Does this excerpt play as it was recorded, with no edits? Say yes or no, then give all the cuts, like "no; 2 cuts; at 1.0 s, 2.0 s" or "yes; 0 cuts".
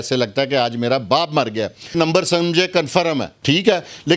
no; 2 cuts; at 1.9 s, 3.3 s